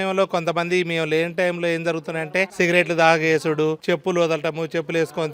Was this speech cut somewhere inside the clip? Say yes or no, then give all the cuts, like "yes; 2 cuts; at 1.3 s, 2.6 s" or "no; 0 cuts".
yes; 2 cuts; at 2.5 s, 3.8 s